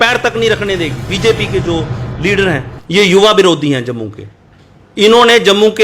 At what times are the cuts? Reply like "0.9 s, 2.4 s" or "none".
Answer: 1.1 s